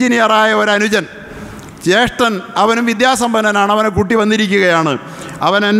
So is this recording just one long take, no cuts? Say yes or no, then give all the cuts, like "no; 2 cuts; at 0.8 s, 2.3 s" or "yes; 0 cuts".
yes; 0 cuts